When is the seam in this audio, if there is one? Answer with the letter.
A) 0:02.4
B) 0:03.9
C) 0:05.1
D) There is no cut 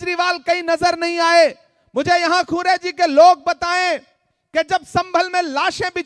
D